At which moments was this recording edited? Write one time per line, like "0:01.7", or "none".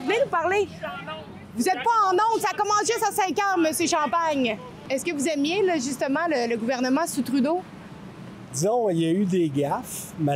0:04.8